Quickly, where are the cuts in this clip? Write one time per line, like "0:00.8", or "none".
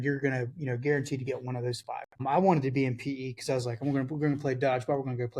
0:02.2